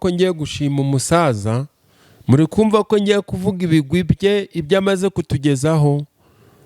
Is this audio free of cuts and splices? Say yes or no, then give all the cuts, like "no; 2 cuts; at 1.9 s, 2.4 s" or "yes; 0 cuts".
yes; 0 cuts